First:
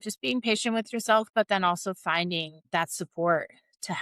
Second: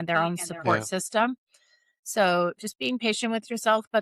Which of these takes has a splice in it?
first; 1 cut; at 2.6 s

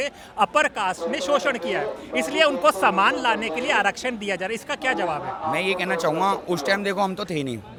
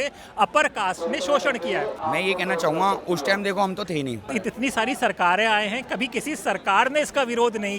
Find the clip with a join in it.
second; 2 cuts; at 2.0 s, 4.3 s

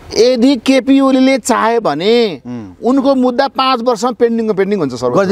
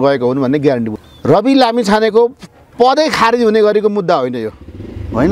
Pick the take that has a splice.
second; 1 cut; at 0.9 s

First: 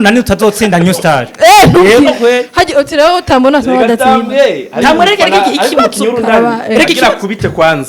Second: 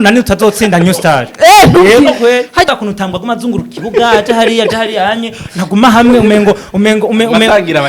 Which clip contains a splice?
second; 1 cut; at 2.7 s

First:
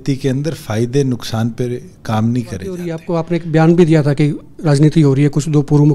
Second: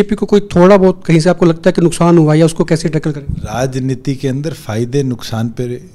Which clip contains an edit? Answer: first; 1 cut; at 3.0 s

